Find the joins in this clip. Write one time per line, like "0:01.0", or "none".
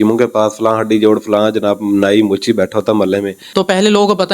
0:03.4